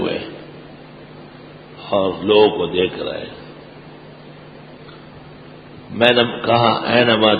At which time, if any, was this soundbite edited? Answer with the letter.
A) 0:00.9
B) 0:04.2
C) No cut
C